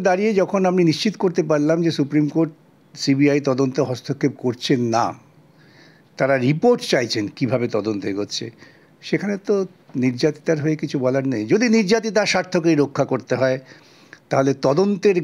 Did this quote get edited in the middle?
no; 0 cuts

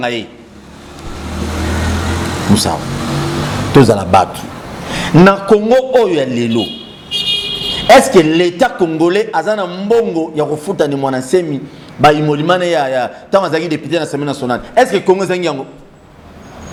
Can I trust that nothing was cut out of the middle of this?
yes; 0 cuts

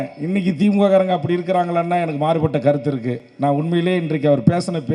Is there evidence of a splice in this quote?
no; 0 cuts

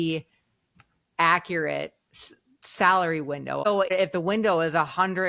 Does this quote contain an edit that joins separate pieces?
yes; 1 cut; at 3.9 s

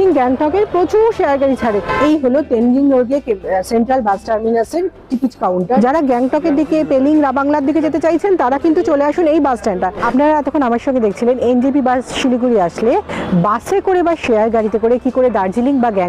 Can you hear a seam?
yes; 3 cuts; at 1.9 s, 5.8 s, 10.0 s

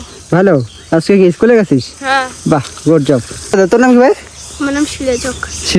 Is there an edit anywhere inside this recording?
no; 0 cuts

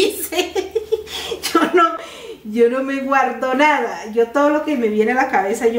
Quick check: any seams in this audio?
no; 0 cuts

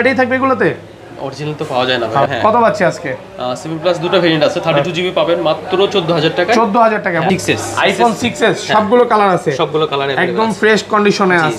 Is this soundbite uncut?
no; 2 cuts; at 2.3 s, 7.3 s

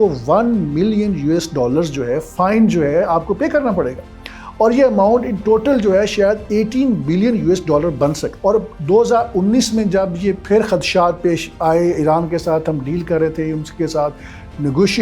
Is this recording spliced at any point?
no; 0 cuts

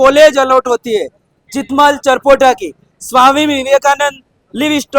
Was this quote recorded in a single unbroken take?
yes; 0 cuts

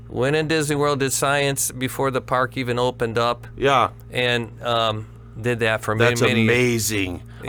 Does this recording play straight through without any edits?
yes; 0 cuts

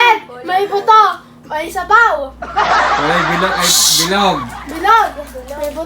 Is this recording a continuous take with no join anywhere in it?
no; 2 cuts; at 2.4 s, 3.2 s

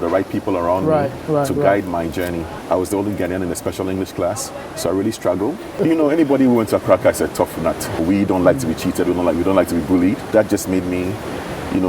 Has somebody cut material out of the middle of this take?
yes; 4 cuts; at 2.5 s, 5.7 s, 8.0 s, 10.3 s

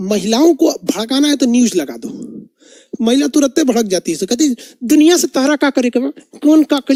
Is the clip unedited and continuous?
yes; 0 cuts

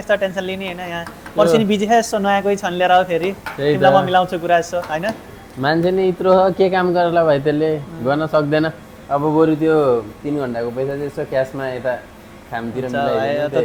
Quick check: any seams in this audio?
no; 0 cuts

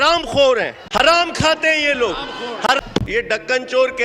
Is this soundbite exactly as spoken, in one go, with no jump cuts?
no; 2 cuts; at 1.1 s, 2.8 s

